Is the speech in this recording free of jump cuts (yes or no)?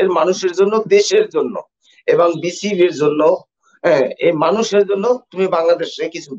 yes